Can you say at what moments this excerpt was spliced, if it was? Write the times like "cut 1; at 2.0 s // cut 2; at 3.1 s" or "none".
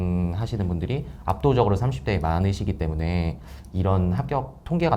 none